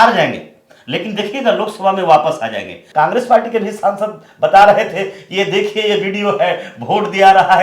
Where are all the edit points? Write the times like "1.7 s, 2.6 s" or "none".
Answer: 2.8 s